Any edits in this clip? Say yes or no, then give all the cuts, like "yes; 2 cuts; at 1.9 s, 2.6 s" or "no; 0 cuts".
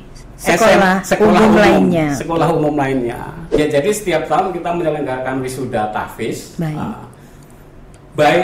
yes; 1 cut; at 3.3 s